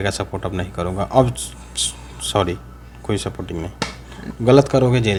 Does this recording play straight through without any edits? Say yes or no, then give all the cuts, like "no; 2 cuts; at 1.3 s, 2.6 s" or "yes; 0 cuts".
yes; 0 cuts